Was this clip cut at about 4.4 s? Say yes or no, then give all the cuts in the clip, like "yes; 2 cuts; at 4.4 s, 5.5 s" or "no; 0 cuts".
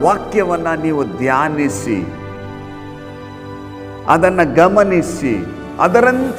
no; 0 cuts